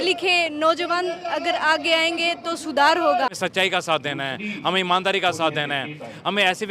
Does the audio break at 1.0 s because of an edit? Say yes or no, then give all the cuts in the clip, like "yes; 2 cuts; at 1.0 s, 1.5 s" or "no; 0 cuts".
no; 1 cut; at 3.3 s